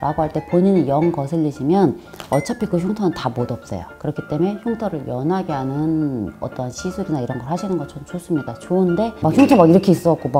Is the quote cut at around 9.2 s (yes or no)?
yes